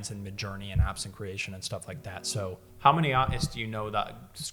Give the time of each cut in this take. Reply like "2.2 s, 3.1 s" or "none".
2.6 s